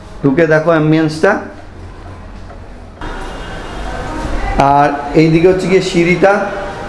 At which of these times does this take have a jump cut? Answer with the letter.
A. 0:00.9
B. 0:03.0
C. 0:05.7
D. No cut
B